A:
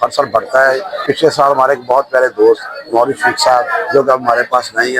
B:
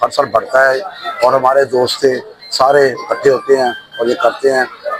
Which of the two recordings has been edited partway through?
A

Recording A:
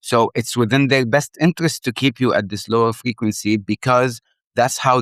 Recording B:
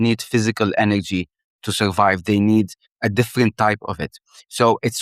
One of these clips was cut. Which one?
B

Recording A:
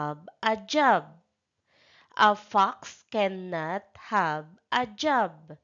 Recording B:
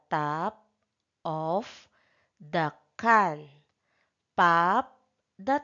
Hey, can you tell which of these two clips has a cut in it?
B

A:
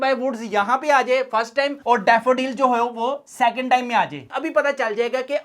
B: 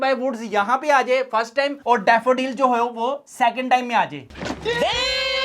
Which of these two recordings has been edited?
A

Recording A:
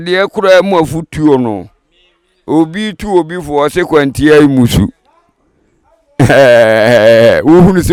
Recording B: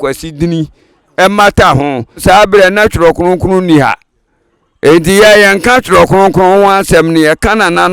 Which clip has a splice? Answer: B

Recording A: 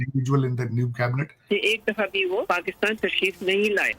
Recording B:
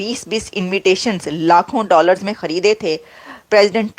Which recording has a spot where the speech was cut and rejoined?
A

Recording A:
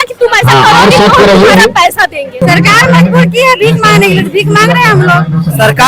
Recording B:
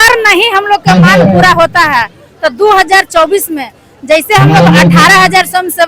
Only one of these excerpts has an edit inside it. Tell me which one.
A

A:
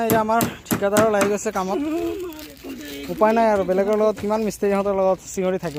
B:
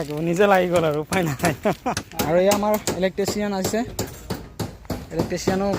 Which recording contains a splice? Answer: B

